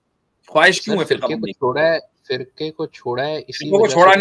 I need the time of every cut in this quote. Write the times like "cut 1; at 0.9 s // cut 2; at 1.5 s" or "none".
none

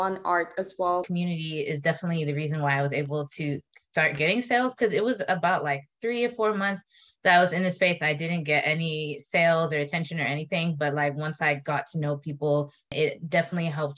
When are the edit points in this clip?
cut 1; at 1.1 s // cut 2; at 12.9 s

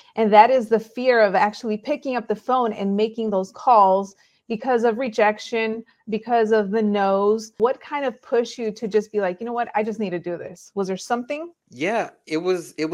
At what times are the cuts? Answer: cut 1; at 7.5 s // cut 2; at 11.6 s

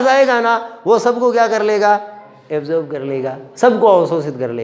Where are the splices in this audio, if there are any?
none

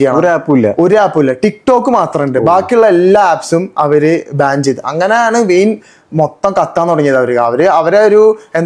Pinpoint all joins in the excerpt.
none

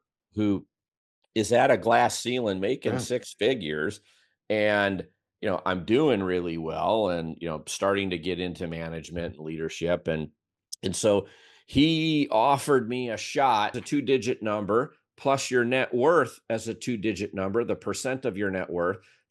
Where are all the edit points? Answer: cut 1; at 13.8 s

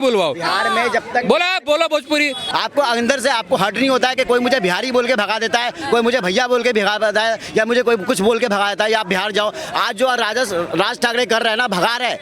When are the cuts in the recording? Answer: cut 1; at 2.4 s

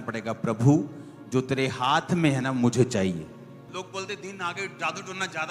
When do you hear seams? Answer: cut 1; at 3.6 s

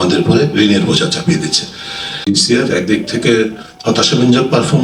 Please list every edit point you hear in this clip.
cut 1; at 2.2 s

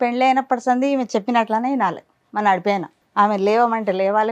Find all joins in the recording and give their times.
cut 1; at 3.0 s

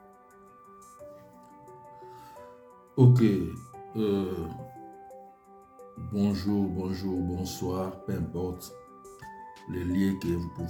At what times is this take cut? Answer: none

